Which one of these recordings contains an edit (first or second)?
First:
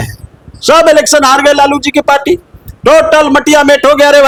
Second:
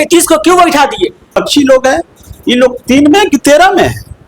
second